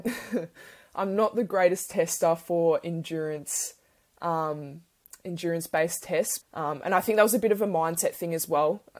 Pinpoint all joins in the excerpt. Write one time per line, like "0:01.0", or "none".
0:06.3

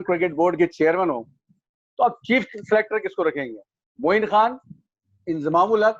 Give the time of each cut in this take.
none

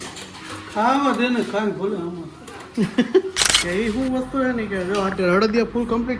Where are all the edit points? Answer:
0:03.5

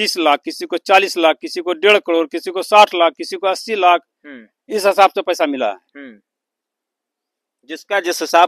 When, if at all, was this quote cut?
none

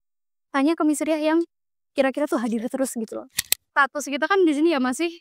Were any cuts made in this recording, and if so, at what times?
0:03.2

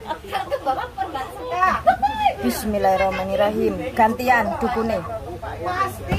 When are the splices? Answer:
0:01.4

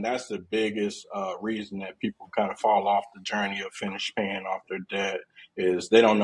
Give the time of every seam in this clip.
none

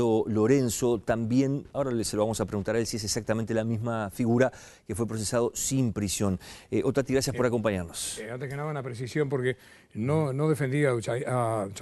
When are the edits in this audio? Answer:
0:10.8

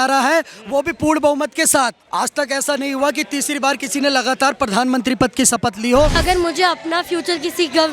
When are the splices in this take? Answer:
0:02.0
0:06.2

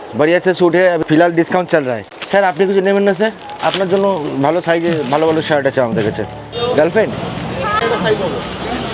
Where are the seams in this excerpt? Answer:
0:02.2
0:06.5

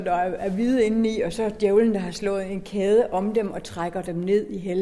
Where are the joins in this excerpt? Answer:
none

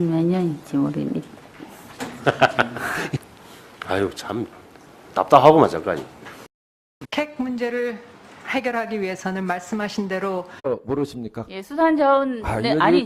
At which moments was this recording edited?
none

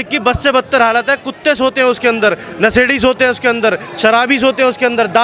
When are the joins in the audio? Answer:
none

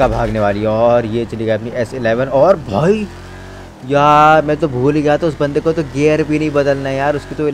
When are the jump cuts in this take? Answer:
none

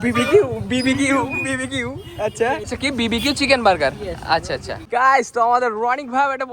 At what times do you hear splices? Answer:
0:02.6
0:04.7

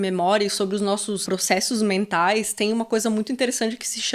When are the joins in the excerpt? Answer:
0:01.2

